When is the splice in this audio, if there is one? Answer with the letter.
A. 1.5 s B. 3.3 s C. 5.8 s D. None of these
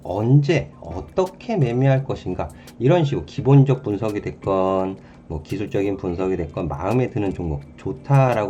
D